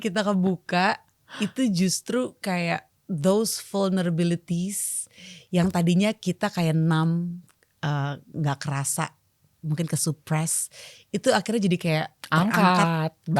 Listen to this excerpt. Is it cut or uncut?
uncut